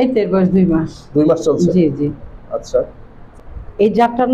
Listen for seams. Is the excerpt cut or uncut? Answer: cut